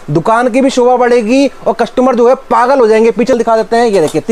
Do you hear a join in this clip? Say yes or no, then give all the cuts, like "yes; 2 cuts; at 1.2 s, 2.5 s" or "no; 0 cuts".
yes; 1 cut; at 3.3 s